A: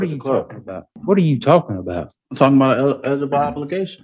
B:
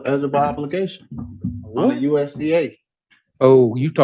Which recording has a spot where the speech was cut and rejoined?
A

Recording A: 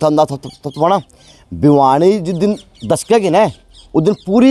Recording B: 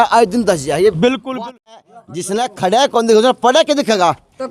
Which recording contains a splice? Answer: B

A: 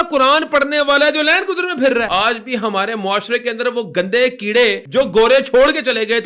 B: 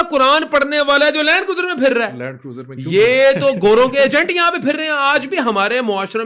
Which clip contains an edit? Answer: A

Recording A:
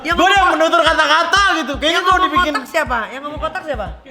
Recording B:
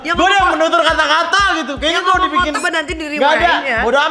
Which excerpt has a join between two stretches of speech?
B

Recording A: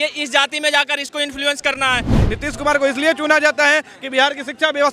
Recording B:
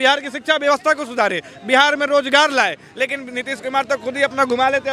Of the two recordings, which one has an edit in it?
A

